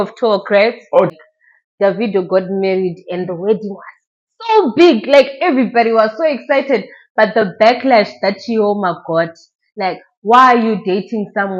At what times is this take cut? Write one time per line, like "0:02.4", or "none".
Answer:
0:01.1